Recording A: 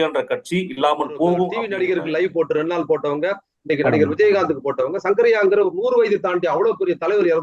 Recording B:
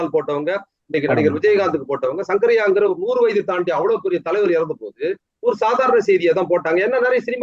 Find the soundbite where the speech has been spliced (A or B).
A